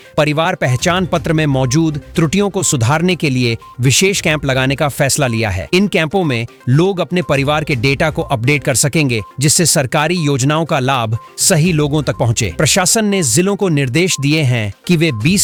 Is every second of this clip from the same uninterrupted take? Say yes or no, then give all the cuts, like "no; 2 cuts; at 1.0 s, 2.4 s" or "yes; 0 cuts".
yes; 0 cuts